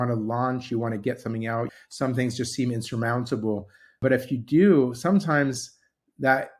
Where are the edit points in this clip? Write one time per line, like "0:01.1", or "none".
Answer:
0:01.7
0:04.0